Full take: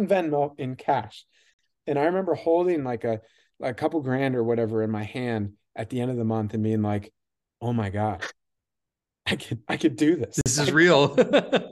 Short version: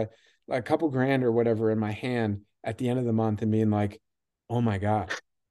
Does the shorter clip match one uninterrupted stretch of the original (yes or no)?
yes